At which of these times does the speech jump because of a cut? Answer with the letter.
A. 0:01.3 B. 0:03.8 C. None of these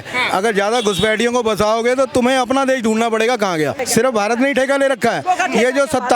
B